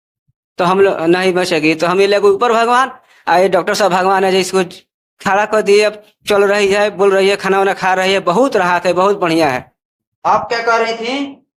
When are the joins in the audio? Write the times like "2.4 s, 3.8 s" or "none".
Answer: none